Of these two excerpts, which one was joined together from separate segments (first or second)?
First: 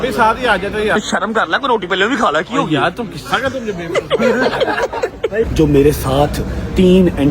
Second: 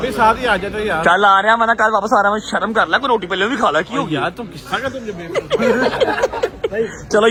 first